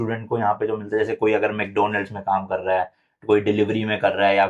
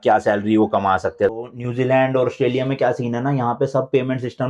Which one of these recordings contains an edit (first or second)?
second